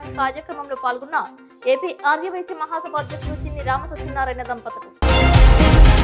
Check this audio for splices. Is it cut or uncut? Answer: cut